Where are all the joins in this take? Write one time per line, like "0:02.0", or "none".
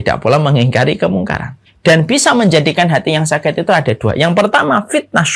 0:01.7